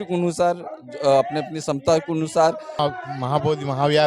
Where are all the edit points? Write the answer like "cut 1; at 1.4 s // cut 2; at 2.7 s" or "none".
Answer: cut 1; at 2.8 s